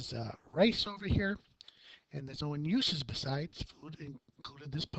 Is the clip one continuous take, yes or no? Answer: yes